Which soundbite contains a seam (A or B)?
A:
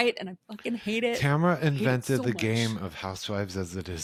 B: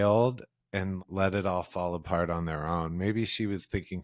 B